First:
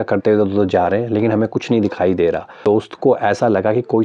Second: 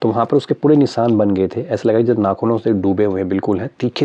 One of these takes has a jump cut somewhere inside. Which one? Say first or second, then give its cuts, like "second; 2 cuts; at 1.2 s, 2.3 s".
first; 1 cut; at 2.9 s